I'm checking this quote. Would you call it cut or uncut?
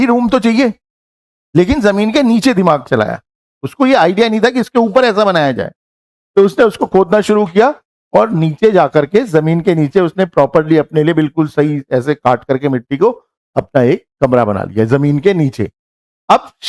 uncut